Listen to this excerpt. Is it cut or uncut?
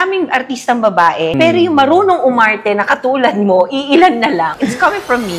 uncut